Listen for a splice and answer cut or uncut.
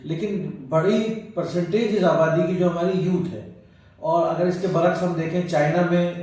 uncut